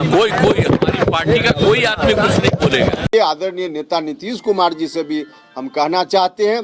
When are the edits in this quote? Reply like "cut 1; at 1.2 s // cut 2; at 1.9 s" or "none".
cut 1; at 3.1 s